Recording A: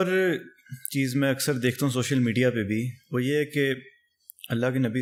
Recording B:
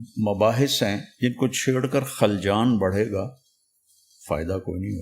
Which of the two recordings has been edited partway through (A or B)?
B